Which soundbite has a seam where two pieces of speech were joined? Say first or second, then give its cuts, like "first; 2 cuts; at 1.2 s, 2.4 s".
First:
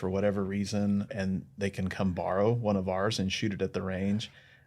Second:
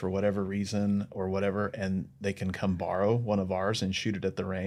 first; 1 cut; at 1.1 s